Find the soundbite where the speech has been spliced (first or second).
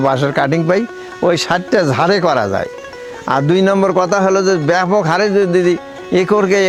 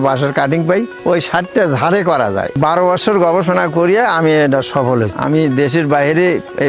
second